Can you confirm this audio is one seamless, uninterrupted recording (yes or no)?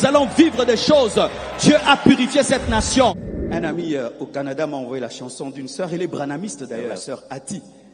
no